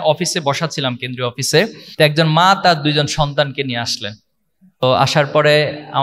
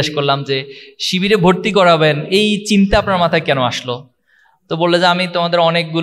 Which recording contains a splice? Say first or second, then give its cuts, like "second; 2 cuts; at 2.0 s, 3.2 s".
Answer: first; 2 cuts; at 1.8 s, 4.8 s